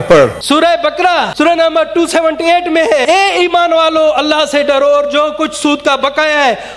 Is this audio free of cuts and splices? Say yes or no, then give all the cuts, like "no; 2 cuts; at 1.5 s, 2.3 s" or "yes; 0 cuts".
no; 2 cuts; at 0.8 s, 3.0 s